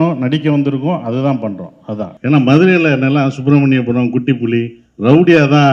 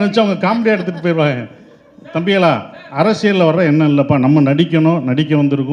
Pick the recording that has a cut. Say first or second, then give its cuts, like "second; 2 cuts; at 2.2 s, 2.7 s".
first; 1 cut; at 2.1 s